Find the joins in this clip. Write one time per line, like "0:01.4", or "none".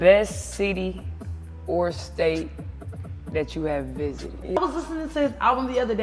0:04.6